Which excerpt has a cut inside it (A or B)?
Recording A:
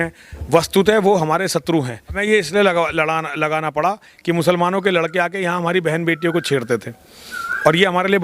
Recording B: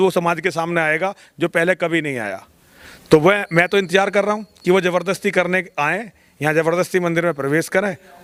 A